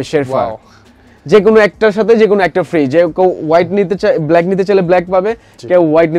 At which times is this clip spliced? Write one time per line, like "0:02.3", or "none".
none